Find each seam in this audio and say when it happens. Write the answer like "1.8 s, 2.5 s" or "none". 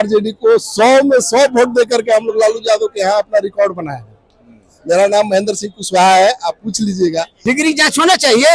7.3 s